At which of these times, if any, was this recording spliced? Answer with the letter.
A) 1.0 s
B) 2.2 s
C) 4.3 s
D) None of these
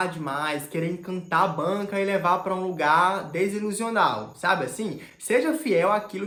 D